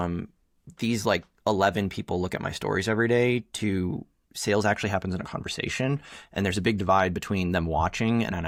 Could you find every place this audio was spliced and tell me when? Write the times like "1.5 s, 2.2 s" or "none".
none

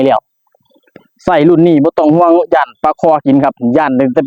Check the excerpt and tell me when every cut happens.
none

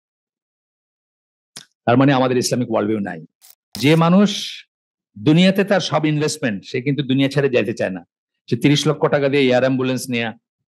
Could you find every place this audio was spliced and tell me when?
3.8 s

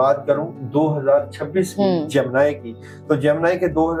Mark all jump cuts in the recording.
none

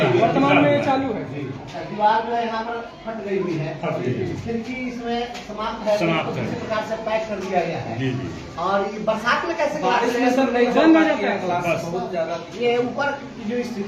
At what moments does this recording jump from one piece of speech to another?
none

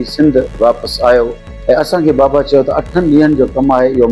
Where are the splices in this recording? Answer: 1.4 s

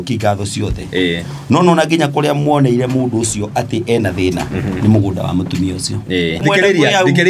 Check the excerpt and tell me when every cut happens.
6.4 s

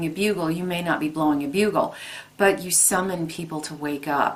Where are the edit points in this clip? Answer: none

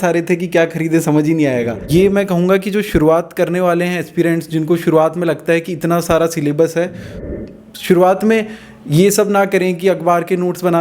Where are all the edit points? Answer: 1.9 s, 7.2 s

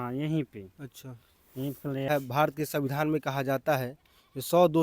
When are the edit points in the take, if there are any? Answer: 2.1 s

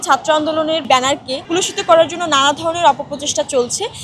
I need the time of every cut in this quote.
1.0 s

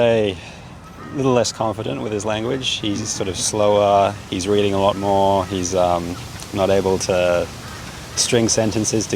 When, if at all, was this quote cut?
none

